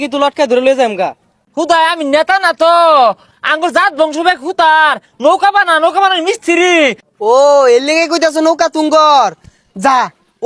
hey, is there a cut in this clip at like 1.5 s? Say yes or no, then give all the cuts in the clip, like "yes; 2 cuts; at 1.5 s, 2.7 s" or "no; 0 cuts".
yes; 2 cuts; at 1.5 s, 7.0 s